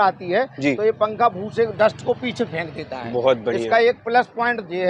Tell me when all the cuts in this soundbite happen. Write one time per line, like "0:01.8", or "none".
none